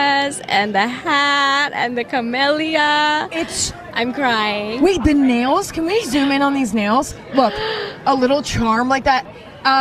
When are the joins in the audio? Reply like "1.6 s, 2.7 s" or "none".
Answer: 3.1 s